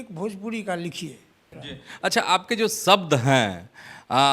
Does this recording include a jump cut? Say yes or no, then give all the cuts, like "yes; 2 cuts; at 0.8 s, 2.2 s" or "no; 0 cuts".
yes; 1 cut; at 1.5 s